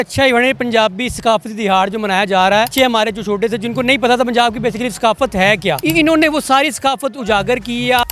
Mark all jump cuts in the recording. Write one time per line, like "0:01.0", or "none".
0:02.7
0:05.8